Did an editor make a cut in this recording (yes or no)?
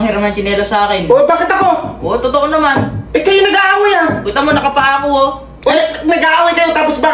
no